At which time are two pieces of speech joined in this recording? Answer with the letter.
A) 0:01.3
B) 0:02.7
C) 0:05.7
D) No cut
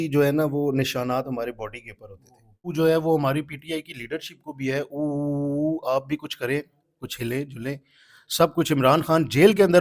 B